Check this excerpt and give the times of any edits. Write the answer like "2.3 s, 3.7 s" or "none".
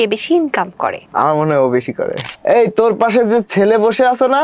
2.2 s

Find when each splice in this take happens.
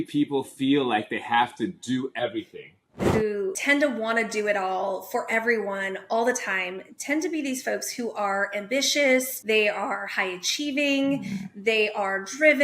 3.3 s, 9.3 s

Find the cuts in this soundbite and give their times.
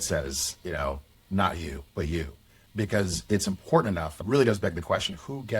2.6 s, 4.2 s

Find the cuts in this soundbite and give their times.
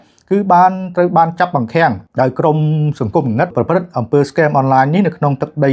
2.0 s, 3.5 s

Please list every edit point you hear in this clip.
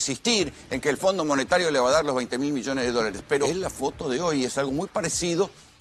3.5 s

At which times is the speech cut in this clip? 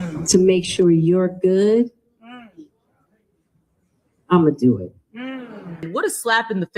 5.9 s

